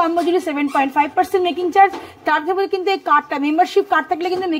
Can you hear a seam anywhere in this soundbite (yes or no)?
no